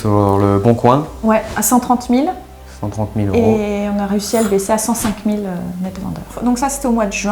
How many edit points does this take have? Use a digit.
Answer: 0